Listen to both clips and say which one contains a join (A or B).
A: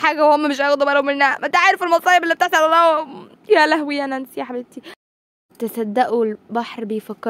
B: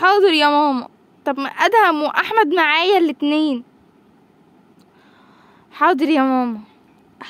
A